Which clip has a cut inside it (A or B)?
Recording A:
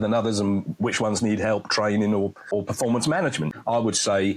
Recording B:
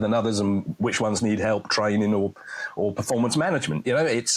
A